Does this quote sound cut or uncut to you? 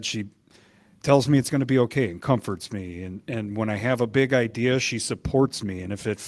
uncut